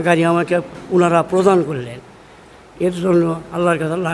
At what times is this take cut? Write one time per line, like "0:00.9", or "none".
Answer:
none